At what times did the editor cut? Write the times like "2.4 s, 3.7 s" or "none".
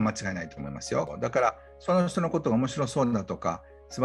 1.1 s